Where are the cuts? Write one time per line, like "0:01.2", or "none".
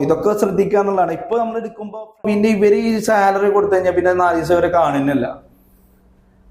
0:02.2